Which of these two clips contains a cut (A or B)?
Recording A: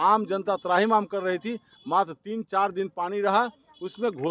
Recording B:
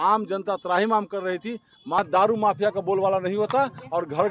B